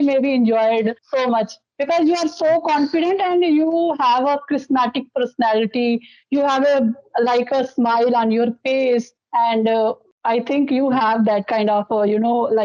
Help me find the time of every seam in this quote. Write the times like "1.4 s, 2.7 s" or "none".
none